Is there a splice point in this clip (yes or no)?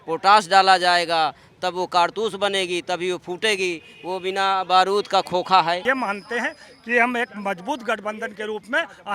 yes